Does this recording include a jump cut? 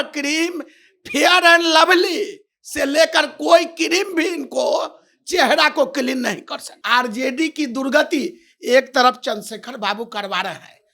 yes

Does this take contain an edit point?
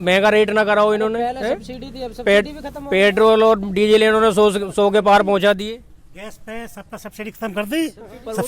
no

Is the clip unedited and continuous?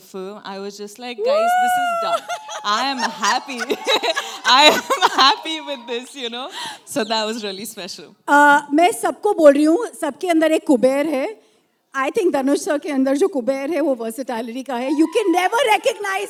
yes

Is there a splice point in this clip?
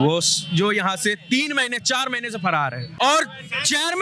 yes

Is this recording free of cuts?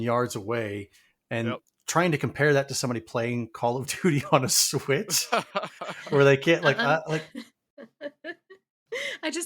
no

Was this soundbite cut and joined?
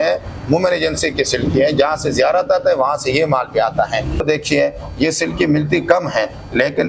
yes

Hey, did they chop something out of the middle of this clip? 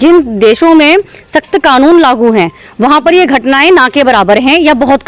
no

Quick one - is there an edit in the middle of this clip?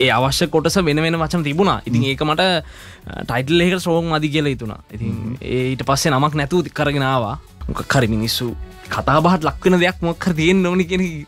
yes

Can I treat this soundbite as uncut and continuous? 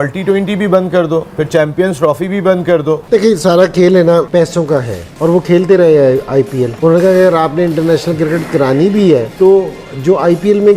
no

